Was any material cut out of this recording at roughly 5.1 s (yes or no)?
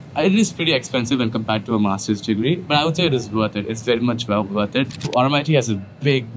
yes